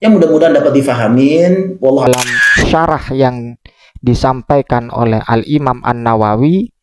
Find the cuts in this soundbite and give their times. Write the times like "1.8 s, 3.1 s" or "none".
2.1 s